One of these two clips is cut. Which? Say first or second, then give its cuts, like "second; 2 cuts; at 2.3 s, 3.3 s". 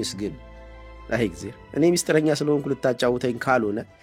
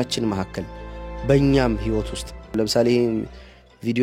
second; 1 cut; at 2.5 s